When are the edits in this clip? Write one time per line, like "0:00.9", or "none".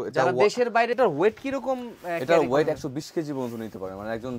0:00.9